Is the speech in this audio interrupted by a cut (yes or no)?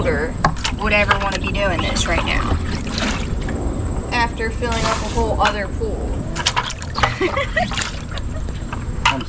yes